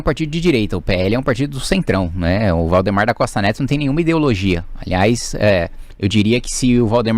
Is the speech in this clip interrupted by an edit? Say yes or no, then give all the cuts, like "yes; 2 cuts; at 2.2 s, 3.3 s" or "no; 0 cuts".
no; 0 cuts